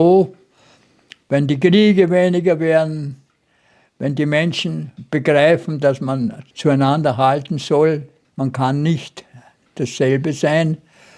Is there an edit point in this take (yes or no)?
yes